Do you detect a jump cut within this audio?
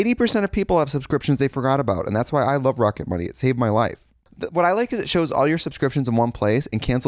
yes; 1 cut; at 4.2 s

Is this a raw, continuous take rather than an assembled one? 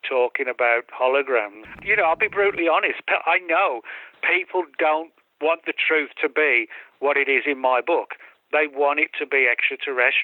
no; 1 cut; at 1.8 s

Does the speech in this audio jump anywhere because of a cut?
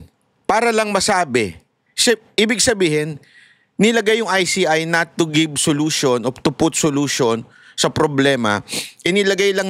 no; 0 cuts

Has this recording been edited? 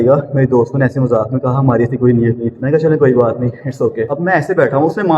yes; 2 cuts; at 2.5 s, 4.1 s

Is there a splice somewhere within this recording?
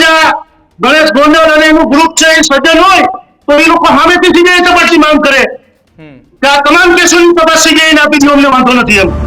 no; 0 cuts

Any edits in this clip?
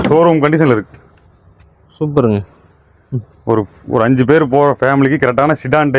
no; 0 cuts

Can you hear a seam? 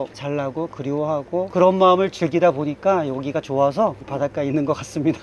yes; 1 cut; at 4.0 s

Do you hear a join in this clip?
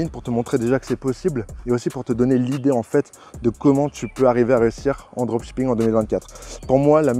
no; 0 cuts

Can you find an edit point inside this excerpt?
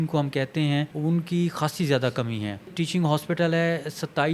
yes; 2 cuts; at 0.9 s, 2.7 s

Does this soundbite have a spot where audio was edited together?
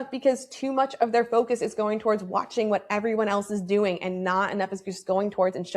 no; 0 cuts

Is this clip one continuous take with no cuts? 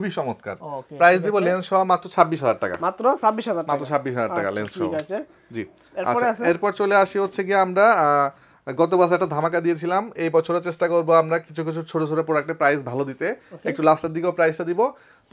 yes; 0 cuts

